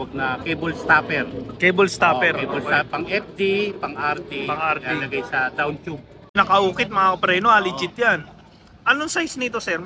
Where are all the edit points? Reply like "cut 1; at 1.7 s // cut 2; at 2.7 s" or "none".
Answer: cut 1; at 6.4 s